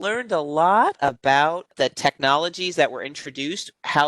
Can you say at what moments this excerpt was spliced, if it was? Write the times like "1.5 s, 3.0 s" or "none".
1.7 s

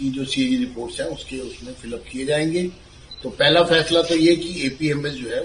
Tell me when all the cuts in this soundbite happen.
none

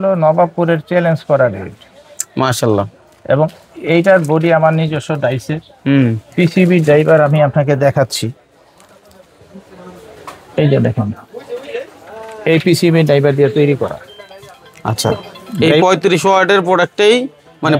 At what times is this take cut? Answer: none

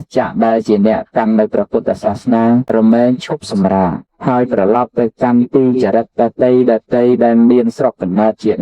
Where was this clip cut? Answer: 2.9 s, 4.5 s

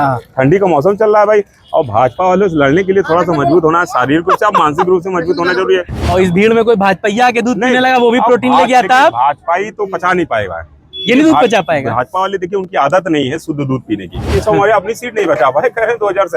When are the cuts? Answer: 6.0 s, 14.3 s

